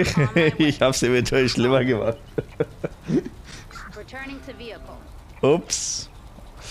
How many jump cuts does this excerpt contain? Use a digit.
0